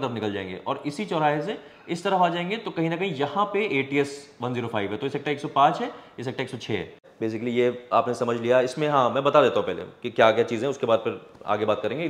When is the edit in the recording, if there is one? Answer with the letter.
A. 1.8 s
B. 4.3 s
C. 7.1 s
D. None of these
C